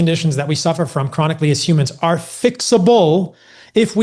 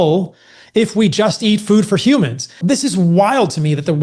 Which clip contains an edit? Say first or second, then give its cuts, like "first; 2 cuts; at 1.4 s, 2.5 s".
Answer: second; 1 cut; at 2.6 s